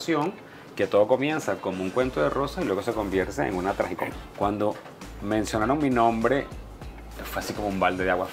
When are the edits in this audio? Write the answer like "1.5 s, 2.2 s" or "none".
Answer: 4.1 s